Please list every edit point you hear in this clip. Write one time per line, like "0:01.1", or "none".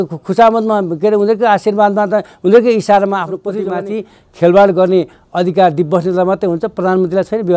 0:03.5